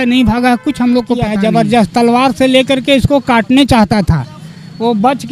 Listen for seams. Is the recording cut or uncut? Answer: cut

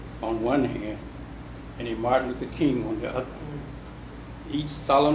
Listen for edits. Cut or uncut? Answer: cut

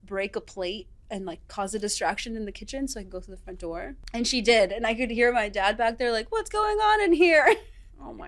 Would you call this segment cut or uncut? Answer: cut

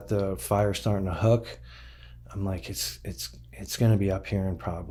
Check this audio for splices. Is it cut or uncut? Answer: uncut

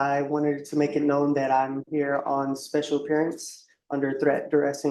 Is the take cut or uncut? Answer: uncut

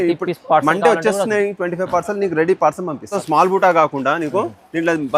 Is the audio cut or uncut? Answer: cut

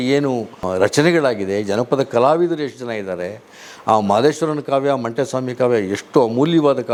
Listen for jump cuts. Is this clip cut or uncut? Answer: uncut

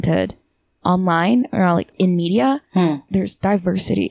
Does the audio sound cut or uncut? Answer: cut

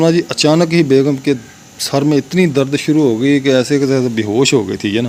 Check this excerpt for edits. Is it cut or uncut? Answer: uncut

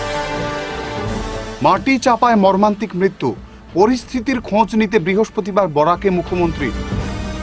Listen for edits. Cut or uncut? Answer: cut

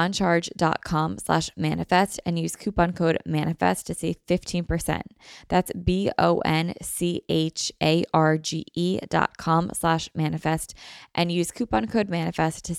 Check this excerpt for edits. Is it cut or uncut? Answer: uncut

